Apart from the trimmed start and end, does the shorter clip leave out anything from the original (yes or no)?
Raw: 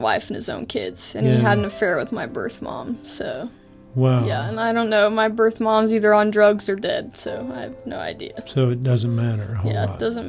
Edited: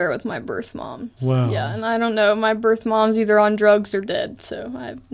yes